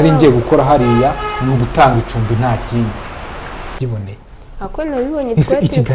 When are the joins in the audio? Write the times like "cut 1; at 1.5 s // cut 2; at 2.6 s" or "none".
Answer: cut 1; at 3.7 s